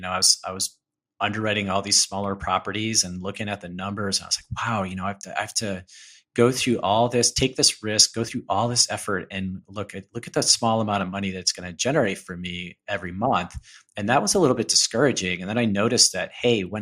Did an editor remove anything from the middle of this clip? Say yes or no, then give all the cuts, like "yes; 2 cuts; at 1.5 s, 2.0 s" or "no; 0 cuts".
no; 0 cuts